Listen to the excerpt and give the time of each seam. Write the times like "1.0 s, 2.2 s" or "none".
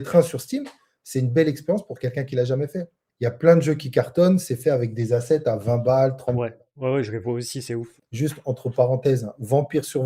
3.0 s, 8.0 s